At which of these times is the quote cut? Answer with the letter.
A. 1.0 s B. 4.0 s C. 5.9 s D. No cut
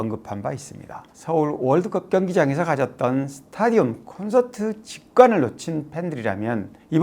A